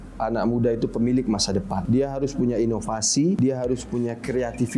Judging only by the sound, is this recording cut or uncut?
cut